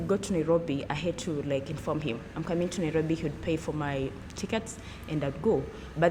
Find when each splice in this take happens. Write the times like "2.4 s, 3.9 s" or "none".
none